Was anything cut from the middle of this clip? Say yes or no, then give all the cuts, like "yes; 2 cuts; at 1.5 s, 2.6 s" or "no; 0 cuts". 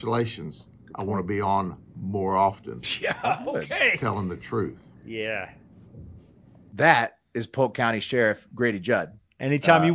no; 0 cuts